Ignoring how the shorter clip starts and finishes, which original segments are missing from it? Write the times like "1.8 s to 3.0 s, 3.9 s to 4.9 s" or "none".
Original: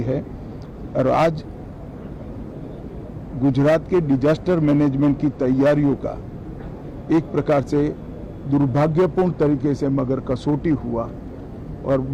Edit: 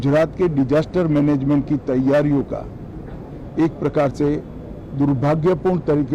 none